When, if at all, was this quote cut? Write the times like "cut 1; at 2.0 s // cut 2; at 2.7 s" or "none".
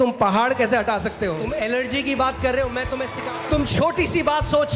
cut 1; at 1.4 s // cut 2; at 3.1 s

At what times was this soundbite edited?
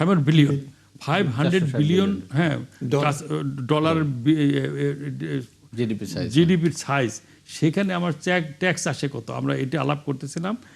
none

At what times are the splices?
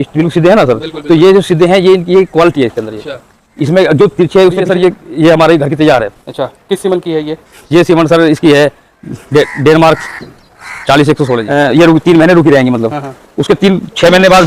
cut 1; at 4.7 s // cut 2; at 11.4 s

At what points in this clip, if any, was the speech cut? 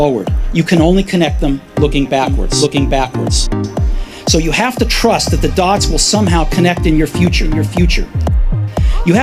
none

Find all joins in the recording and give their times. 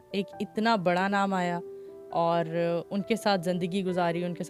none

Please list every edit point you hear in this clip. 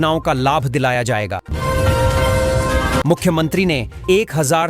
cut 1; at 1.4 s // cut 2; at 3.0 s

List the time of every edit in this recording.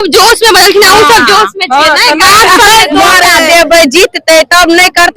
cut 1; at 3.3 s

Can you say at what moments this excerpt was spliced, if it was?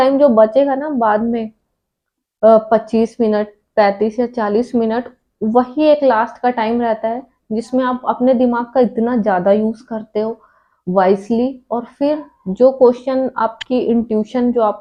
none

